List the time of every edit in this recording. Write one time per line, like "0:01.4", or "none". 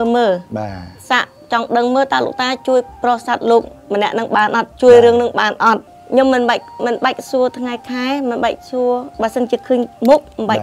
0:05.9